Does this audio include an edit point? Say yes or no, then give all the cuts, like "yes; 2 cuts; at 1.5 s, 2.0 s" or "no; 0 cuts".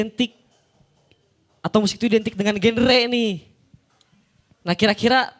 no; 0 cuts